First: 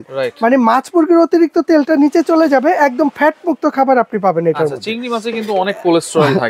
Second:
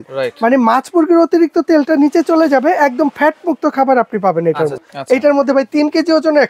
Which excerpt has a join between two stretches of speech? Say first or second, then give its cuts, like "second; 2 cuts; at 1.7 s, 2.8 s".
second; 1 cut; at 4.9 s